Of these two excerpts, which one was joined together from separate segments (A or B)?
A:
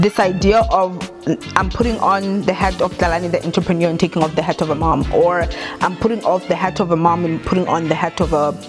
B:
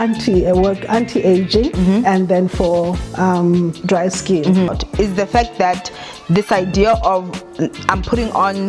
B